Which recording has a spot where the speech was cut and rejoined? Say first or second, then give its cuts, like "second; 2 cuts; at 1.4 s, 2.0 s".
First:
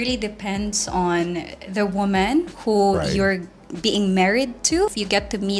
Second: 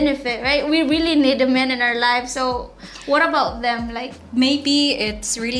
second; 1 cut; at 4.1 s